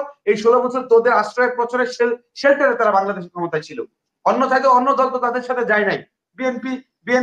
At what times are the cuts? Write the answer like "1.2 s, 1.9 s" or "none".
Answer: none